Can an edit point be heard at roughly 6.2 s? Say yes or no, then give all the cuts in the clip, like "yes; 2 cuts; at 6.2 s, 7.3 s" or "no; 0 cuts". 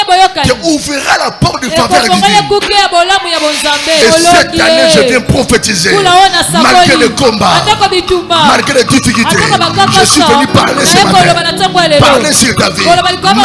no; 1 cut; at 4.0 s